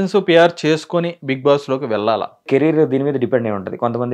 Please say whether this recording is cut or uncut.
cut